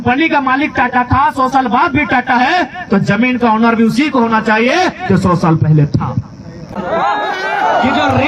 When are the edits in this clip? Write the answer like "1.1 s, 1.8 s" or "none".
none